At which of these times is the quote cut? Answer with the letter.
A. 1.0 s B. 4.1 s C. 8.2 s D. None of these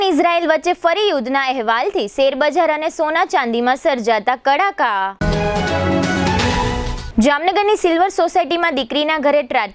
D